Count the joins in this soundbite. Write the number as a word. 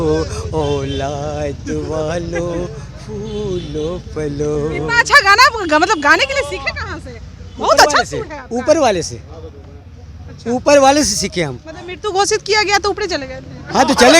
zero